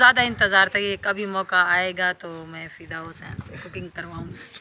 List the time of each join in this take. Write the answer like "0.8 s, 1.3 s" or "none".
none

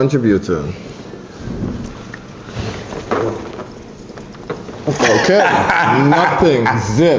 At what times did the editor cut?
none

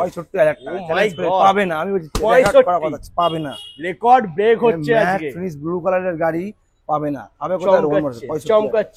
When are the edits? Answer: none

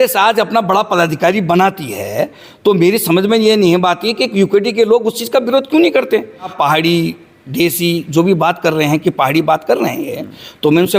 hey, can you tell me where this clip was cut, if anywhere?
6.5 s

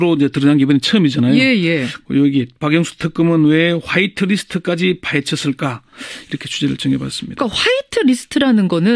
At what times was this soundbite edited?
none

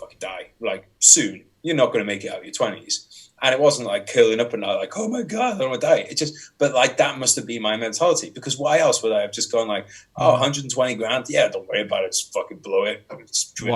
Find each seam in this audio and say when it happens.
none

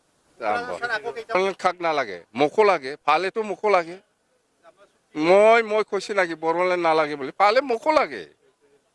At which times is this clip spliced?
1.3 s

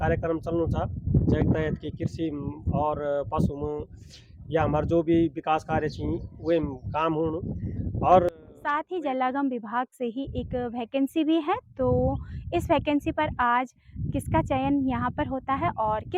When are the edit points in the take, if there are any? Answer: 8.3 s

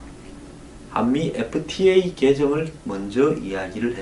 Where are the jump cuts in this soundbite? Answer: none

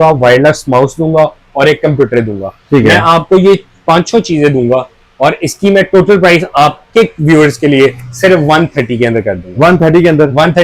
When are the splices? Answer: none

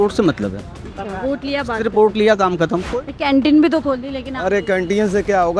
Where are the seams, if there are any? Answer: 2.8 s

